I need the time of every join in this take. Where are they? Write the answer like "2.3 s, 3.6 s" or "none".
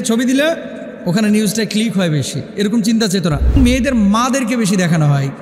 3.5 s